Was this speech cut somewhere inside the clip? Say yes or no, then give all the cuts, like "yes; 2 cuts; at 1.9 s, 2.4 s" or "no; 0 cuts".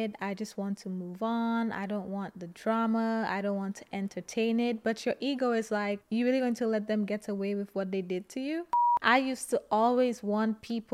yes; 1 cut; at 8.8 s